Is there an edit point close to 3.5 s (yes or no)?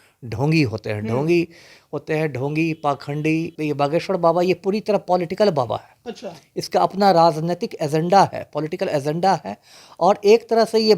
yes